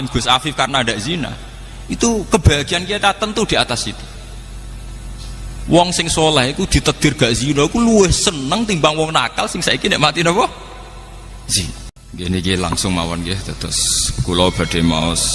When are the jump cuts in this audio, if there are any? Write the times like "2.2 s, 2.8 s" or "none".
12.0 s

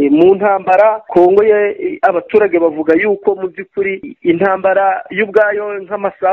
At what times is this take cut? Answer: 1.0 s, 4.1 s

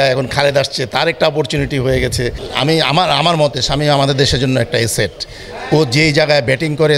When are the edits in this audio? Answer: 2.4 s

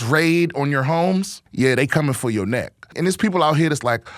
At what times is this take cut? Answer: 1.4 s, 2.9 s

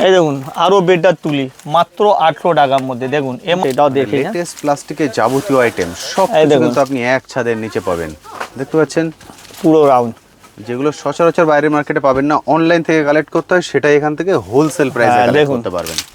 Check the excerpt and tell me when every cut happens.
3.6 s

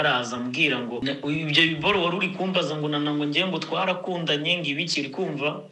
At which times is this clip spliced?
1.0 s

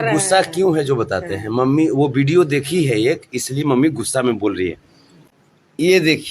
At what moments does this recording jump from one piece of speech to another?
5.2 s

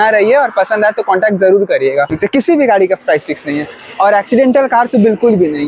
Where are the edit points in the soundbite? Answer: 2.1 s

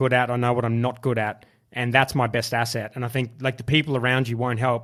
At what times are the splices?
none

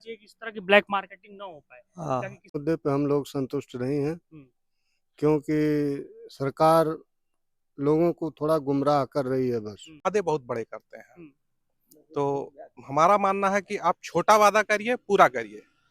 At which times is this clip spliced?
2.6 s, 10.0 s

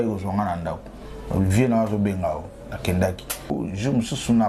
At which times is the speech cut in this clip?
3.5 s

